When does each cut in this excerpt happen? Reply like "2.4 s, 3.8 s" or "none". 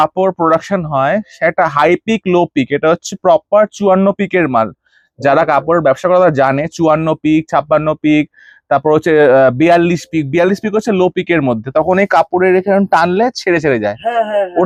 none